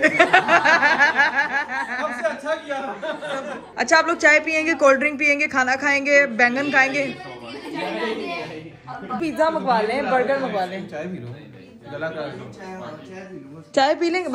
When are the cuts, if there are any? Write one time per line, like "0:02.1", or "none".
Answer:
none